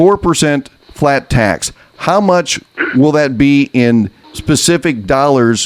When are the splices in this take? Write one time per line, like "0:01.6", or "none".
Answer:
none